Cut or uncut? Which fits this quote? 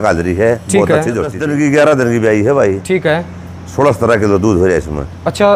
cut